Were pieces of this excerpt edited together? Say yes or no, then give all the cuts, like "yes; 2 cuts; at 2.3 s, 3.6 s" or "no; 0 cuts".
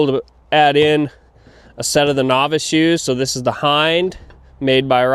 no; 0 cuts